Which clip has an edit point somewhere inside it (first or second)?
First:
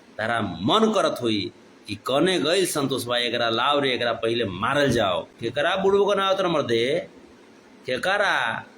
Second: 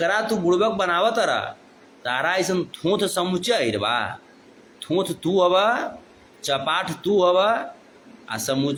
first